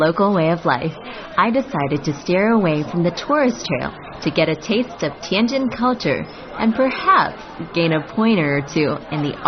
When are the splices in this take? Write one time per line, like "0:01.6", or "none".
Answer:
0:08.4